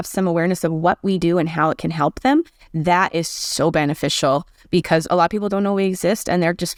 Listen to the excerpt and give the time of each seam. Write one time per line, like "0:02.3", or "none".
none